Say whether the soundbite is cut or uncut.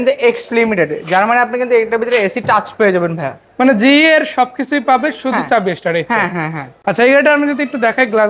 uncut